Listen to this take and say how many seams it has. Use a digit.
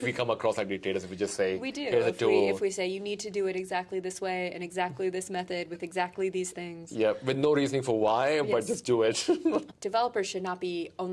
1